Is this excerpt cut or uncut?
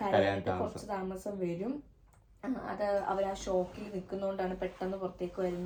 uncut